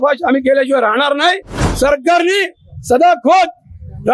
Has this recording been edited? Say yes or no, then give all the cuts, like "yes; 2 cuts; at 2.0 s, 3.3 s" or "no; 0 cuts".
yes; 1 cut; at 1.6 s